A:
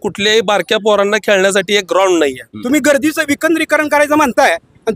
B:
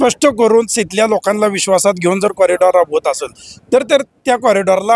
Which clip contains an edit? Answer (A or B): A